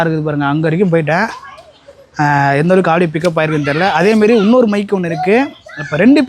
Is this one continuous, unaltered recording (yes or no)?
yes